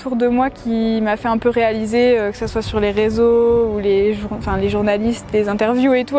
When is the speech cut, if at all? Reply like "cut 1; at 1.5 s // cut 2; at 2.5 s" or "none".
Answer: none